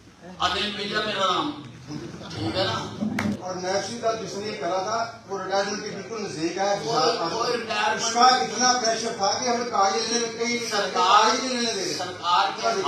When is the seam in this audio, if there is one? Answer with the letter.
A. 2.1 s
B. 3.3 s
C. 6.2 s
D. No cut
B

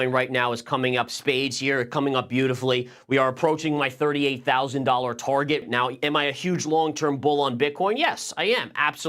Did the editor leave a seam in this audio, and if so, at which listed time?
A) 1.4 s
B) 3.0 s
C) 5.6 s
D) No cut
C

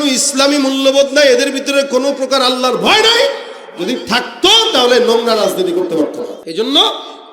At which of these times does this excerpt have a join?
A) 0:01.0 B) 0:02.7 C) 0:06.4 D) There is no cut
C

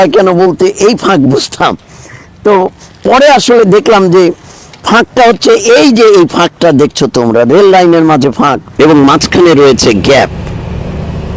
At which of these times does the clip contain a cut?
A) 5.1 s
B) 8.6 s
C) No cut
B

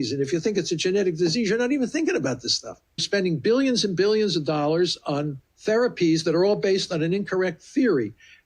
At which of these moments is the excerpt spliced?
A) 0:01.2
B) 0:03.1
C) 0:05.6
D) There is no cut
B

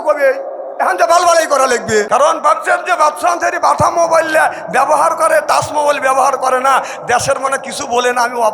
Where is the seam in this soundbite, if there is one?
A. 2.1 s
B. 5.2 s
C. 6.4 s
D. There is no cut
A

